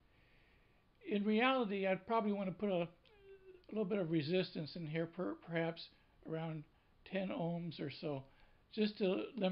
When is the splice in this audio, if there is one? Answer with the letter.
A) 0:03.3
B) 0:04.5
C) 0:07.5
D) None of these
B